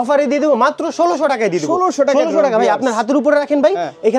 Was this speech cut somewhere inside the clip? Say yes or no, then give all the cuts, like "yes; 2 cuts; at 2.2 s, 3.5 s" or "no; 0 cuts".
no; 0 cuts